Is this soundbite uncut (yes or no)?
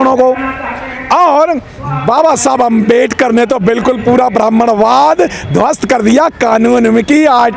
yes